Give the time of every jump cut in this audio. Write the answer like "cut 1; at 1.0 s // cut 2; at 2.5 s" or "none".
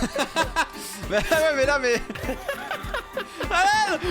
cut 1; at 2.2 s